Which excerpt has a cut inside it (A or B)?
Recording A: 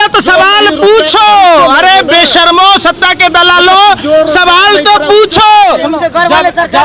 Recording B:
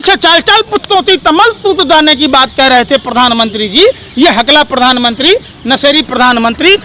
A